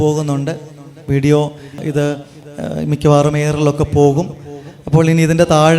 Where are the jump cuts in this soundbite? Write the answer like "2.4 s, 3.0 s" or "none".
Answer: 1.8 s